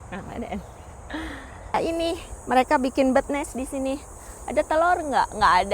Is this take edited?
yes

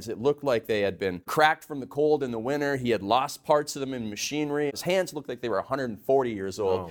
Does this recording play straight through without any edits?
no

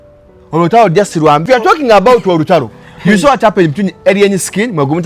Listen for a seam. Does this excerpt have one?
yes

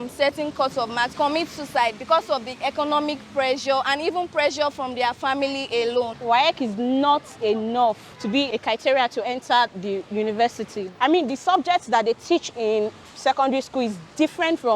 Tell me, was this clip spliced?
yes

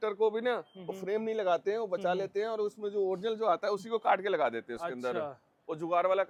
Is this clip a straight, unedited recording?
yes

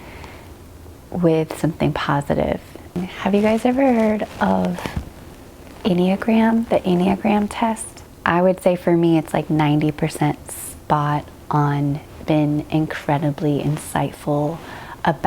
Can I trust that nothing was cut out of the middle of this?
no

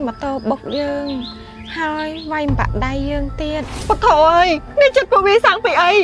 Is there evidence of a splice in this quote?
yes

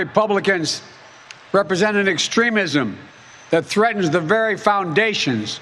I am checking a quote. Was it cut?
no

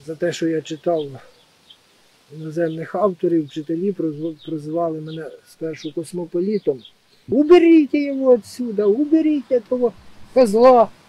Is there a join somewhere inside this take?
yes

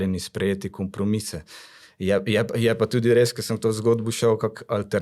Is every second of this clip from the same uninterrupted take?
yes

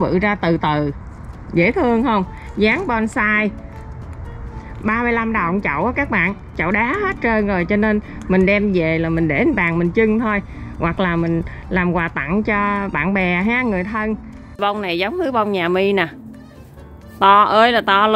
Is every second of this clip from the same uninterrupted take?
no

